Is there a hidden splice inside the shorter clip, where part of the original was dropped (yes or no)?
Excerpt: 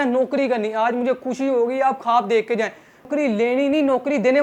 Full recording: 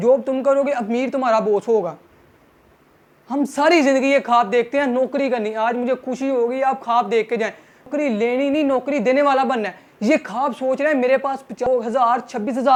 no